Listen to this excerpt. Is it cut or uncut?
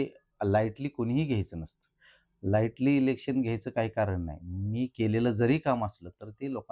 uncut